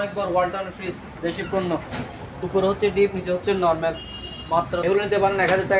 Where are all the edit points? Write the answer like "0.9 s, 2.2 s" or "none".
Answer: 4.8 s